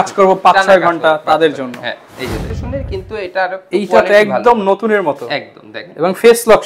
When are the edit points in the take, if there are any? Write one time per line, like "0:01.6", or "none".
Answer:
0:02.6